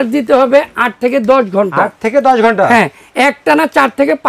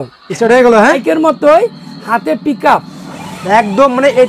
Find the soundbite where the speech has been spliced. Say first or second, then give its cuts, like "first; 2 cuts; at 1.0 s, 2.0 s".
second; 1 cut; at 1.0 s